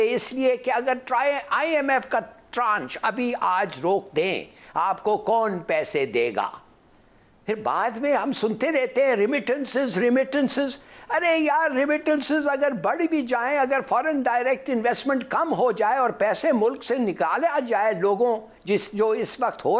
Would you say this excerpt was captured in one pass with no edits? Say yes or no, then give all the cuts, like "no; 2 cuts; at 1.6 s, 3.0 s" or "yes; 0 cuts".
yes; 0 cuts